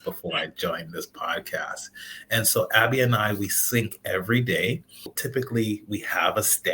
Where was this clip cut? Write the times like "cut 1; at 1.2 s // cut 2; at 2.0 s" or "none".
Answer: cut 1; at 5.2 s